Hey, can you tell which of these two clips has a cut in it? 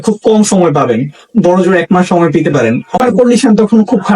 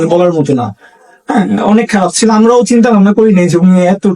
first; 1 cut; at 3.0 s

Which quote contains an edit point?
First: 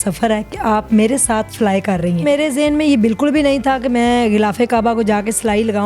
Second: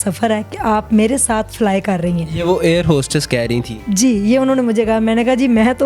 first; 1 cut; at 2.2 s

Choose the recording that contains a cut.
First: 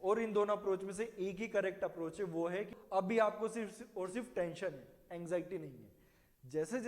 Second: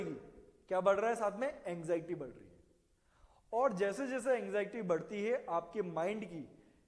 first; 1 cut; at 2.7 s

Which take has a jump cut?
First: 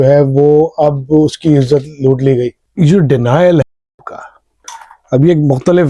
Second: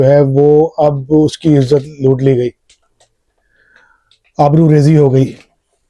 first; 1 cut; at 2.6 s

